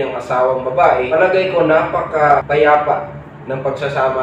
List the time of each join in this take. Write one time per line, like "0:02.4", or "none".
0:01.1
0:02.4

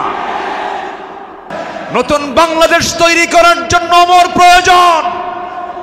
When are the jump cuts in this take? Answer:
0:01.5

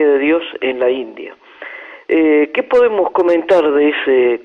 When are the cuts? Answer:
0:01.1

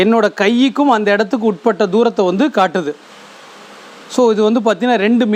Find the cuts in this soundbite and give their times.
none

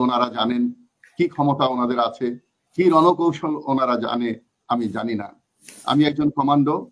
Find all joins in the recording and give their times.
none

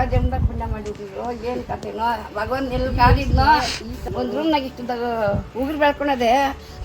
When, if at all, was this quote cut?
0:04.0

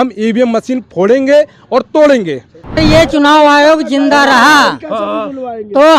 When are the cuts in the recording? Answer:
0:02.8

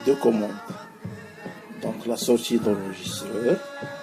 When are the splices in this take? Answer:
none

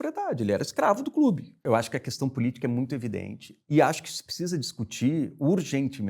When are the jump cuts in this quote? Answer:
0:01.6

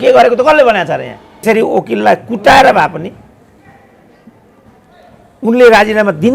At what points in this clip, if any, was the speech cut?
0:01.4

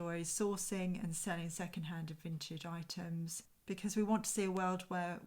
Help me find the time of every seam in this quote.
0:03.5

